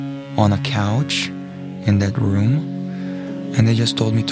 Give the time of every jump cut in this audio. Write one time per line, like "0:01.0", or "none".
0:03.2